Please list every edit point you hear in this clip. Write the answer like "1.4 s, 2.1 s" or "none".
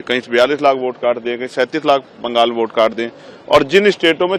none